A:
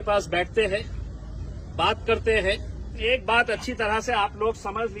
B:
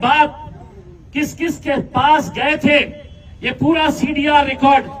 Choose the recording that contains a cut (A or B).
A